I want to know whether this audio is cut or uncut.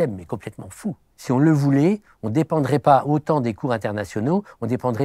cut